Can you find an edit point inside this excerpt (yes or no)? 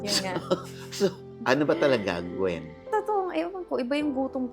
yes